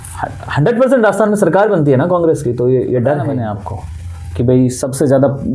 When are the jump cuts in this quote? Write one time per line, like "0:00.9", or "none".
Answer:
0:03.3